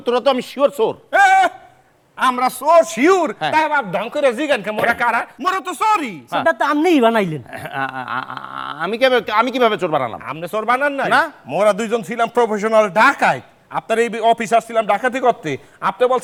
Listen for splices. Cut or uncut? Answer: uncut